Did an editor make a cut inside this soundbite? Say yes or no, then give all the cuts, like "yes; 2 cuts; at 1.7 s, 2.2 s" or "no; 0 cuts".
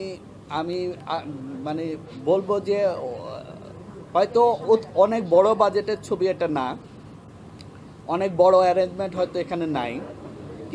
no; 0 cuts